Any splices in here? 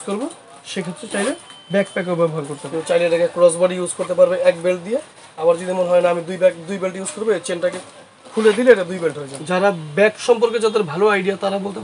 yes; 2 cuts; at 2.6 s, 9.3 s

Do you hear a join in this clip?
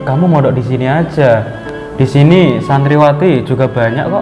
no; 0 cuts

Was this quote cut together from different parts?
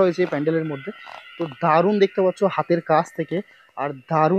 no; 0 cuts

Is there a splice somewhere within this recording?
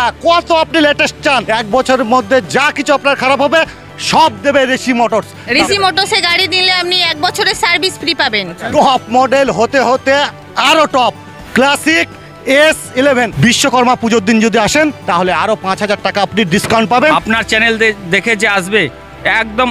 yes; 5 cuts; at 1.4 s, 5.4 s, 8.7 s, 13.3 s, 17.1 s

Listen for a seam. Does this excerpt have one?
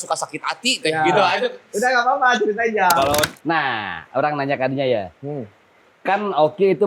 yes; 1 cut; at 3.3 s

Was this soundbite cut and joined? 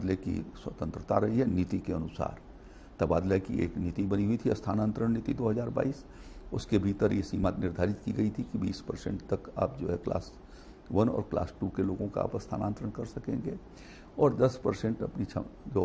no; 0 cuts

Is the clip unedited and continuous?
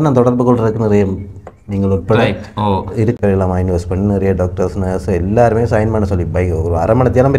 no; 1 cut; at 3.2 s

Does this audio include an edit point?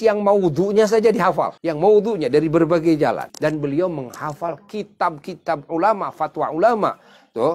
yes; 2 cuts; at 1.6 s, 3.3 s

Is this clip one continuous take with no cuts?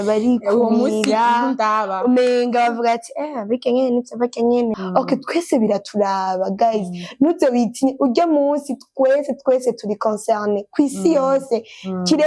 no; 1 cut; at 4.8 s

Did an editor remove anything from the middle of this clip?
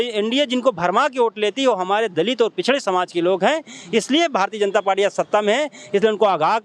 no; 0 cuts

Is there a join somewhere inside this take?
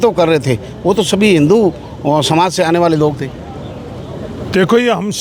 no; 0 cuts

